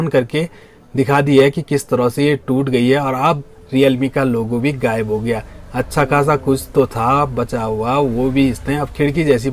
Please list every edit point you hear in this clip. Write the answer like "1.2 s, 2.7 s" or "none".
none